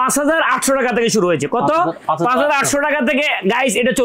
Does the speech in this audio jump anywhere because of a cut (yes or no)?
no